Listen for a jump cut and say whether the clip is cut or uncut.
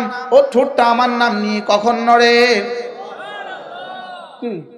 uncut